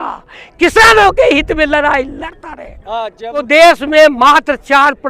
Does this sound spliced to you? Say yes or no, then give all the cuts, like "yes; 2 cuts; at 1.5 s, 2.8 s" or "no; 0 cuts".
no; 0 cuts